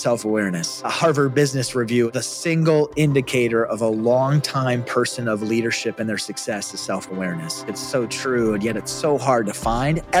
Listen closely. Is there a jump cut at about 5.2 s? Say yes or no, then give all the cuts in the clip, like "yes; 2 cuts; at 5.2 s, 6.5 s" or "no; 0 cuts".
no; 3 cuts; at 0.9 s, 2.1 s, 7.7 s